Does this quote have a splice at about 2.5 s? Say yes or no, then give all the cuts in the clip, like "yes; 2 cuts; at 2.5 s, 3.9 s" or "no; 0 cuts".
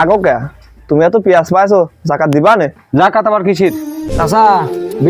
no; 1 cut; at 4.1 s